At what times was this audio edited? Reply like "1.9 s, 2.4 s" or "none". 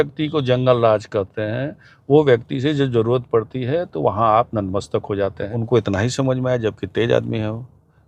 5.5 s

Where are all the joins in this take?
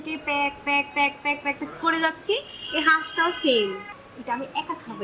3.8 s

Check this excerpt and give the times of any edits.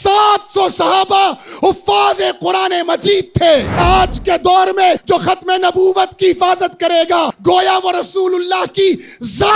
3.8 s, 5.0 s, 7.3 s

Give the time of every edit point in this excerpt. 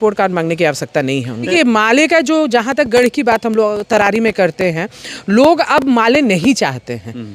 1.5 s

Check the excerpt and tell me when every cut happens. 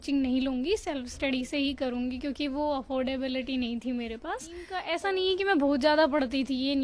4.8 s

